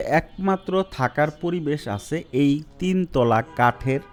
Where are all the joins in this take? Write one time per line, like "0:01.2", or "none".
none